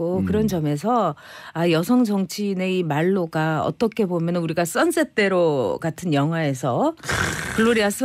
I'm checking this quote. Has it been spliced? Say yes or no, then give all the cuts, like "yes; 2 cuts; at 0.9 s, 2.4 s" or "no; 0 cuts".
no; 0 cuts